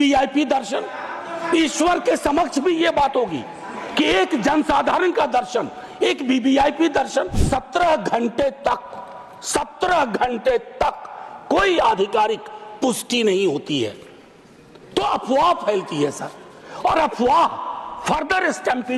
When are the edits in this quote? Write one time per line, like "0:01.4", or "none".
0:07.4